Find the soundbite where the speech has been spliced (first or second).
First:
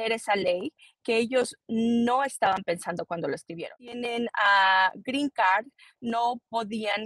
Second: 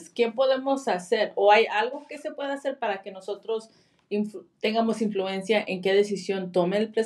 first